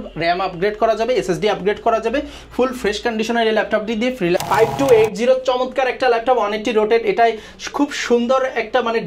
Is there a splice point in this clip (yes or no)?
yes